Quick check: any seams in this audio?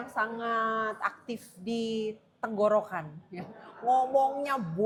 no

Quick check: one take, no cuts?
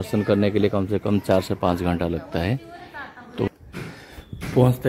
no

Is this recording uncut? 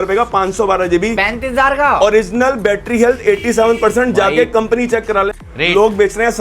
no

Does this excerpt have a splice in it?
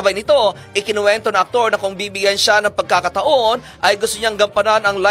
no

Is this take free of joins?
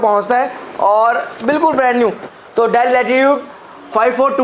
no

